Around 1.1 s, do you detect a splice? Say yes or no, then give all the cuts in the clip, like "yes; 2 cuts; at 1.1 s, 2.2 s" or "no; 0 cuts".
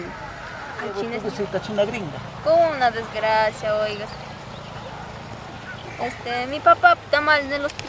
yes; 1 cut; at 1.1 s